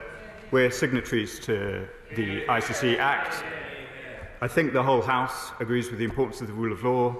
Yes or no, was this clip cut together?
no